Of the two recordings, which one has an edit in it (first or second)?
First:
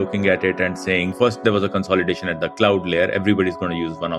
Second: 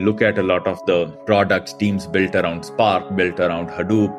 first